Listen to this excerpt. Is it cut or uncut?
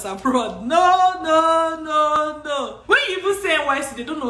cut